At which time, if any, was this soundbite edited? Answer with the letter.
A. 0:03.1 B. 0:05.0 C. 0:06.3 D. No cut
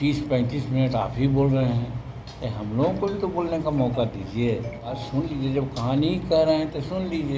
B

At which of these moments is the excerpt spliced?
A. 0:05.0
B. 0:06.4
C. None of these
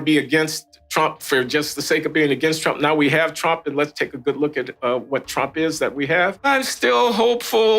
B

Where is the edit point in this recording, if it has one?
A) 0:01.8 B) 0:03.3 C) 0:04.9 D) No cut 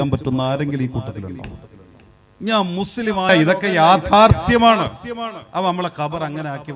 B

